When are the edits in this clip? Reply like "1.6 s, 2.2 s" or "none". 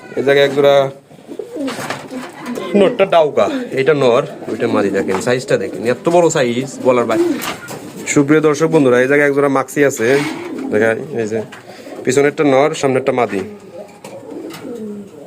7.2 s

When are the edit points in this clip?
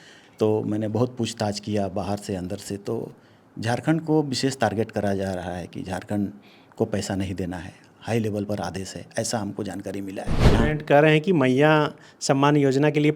10.4 s

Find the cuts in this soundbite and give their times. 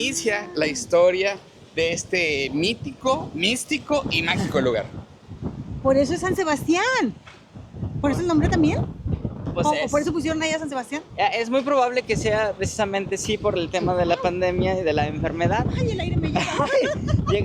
none

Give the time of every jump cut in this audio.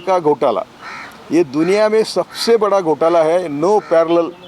none

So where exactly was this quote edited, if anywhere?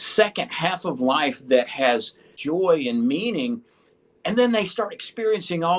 2.3 s

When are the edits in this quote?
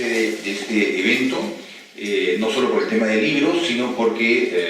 none

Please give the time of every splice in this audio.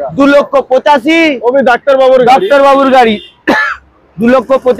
none

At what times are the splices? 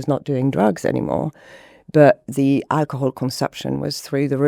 none

